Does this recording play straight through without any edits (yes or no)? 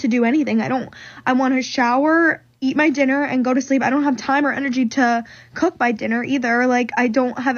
yes